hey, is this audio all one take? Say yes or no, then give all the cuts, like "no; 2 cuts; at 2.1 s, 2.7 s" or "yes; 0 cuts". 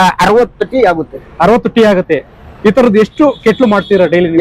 yes; 0 cuts